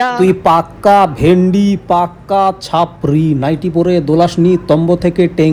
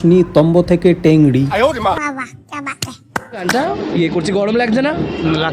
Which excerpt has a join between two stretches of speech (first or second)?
second